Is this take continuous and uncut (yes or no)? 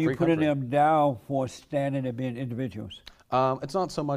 yes